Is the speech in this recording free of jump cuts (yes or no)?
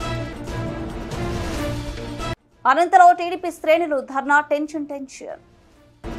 yes